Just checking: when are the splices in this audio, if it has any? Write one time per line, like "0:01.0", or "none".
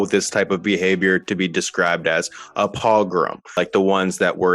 0:03.6